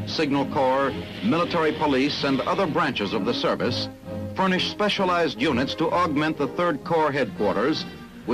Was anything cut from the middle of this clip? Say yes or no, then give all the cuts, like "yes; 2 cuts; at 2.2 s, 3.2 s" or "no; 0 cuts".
yes; 1 cut; at 1.2 s